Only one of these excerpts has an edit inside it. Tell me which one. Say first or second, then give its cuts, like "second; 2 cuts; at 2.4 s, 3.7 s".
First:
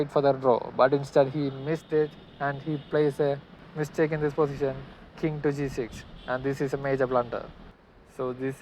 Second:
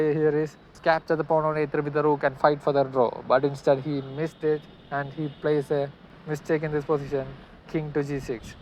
first; 1 cut; at 7.6 s